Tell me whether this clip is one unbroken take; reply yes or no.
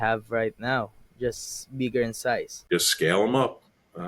no